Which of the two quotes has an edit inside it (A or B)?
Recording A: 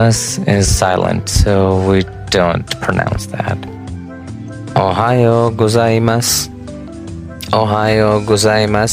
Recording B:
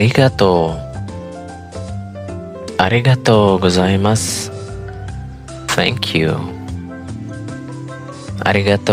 B